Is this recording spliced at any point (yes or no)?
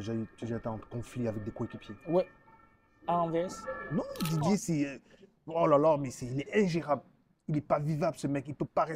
yes